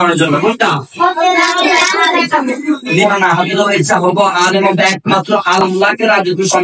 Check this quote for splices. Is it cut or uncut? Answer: cut